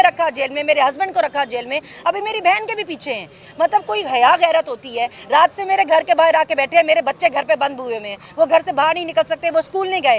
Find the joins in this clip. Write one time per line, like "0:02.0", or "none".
none